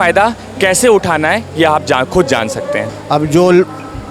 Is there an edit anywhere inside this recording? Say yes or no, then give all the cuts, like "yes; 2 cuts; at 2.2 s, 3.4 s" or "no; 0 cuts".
yes; 1 cut; at 2.9 s